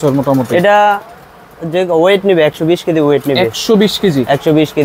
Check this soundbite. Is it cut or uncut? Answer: uncut